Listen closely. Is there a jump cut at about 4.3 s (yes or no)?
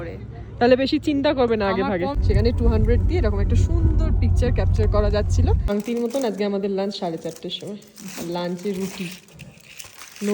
no